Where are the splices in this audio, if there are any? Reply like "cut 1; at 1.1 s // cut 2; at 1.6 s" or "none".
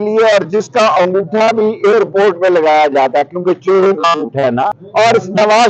cut 1; at 4.8 s